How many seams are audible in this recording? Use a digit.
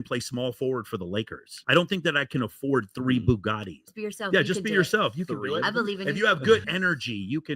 2